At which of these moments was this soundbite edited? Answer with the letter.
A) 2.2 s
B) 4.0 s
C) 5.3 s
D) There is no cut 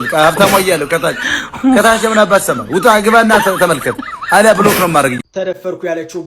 C